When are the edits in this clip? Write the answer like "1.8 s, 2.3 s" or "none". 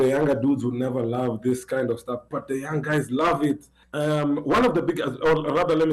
3.8 s